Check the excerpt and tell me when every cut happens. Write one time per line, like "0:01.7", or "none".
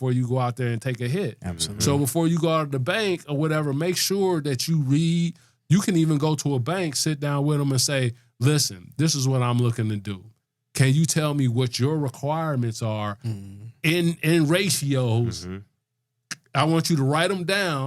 none